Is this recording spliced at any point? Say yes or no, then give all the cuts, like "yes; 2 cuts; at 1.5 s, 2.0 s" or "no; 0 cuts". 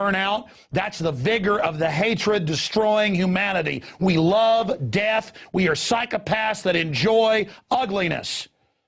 yes; 1 cut; at 4.3 s